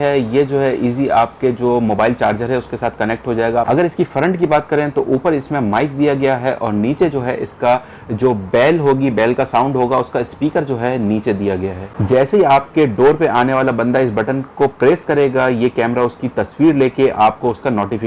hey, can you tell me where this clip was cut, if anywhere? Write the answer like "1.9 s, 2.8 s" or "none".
3.6 s, 11.9 s

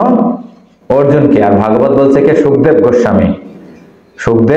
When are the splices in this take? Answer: none

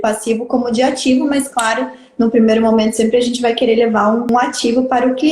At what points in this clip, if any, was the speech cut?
4.3 s

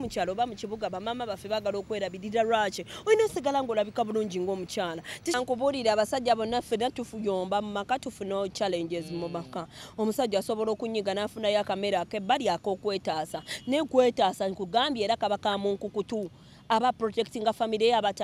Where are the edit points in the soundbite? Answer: 5.3 s

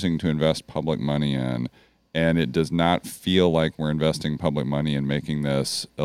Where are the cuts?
none

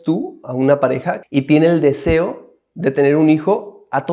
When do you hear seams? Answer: 1.2 s

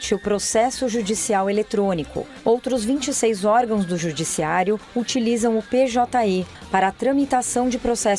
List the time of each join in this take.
6.6 s

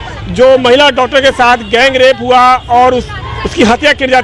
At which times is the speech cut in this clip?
none

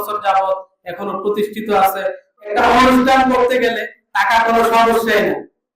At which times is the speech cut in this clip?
2.3 s

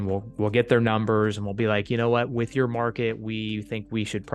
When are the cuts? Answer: none

